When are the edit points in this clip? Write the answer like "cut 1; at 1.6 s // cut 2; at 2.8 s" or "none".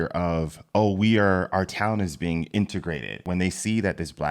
cut 1; at 3.2 s